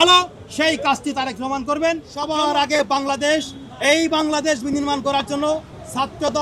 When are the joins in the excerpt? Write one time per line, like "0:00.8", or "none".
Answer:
0:02.3